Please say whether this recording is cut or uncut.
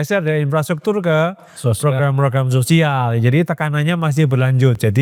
uncut